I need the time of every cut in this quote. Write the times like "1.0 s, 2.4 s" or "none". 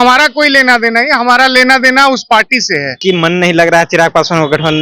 3.0 s